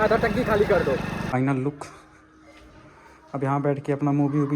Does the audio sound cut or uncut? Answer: cut